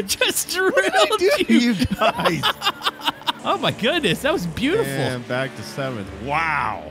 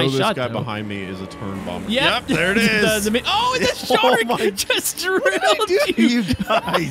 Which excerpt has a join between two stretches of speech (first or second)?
first